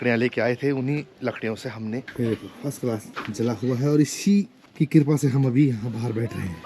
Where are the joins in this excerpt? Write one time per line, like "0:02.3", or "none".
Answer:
0:02.1
0:03.1
0:04.6